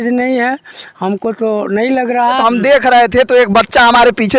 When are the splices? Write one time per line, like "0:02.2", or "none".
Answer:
0:02.4